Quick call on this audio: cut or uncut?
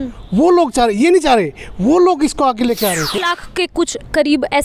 cut